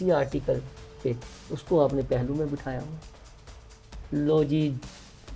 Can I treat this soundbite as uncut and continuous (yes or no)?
yes